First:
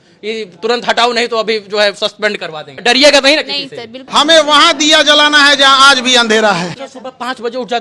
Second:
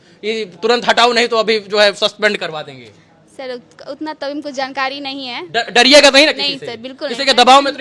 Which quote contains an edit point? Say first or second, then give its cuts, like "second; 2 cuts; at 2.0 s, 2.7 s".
first; 3 cuts; at 2.8 s, 4.0 s, 6.7 s